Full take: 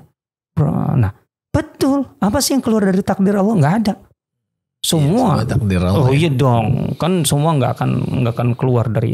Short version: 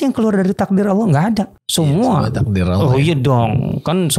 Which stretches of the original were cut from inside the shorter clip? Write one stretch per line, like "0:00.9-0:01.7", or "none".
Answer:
0:04.1-0:04.7